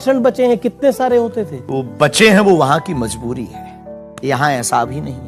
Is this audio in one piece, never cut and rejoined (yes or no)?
no